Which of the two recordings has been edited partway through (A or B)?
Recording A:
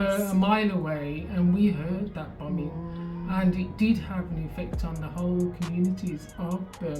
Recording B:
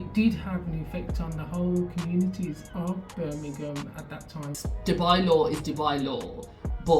B